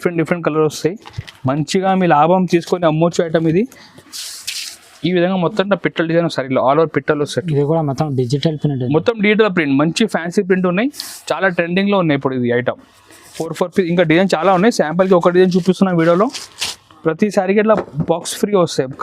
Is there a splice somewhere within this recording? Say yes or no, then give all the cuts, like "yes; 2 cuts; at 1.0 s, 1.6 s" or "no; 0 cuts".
yes; 2 cuts; at 4.1 s, 13.4 s